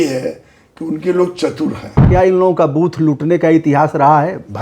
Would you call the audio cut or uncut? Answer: cut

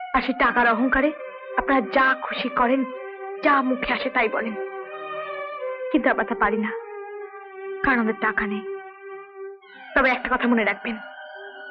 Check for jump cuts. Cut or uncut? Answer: uncut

